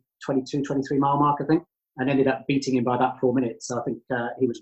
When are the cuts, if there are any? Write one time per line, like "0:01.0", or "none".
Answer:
none